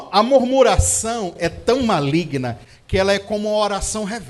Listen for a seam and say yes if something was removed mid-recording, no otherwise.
no